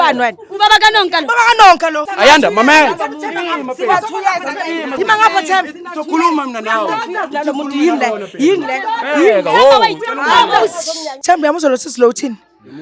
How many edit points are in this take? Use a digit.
2